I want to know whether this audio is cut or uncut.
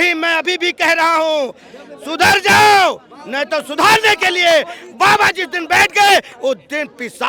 uncut